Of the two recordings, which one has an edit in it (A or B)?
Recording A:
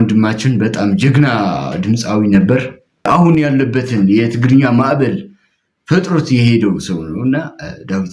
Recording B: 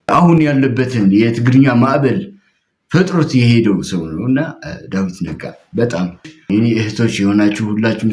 B